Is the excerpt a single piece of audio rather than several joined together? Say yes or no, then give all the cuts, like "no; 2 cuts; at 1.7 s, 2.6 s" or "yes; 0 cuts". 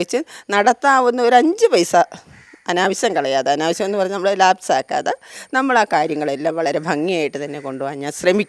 yes; 0 cuts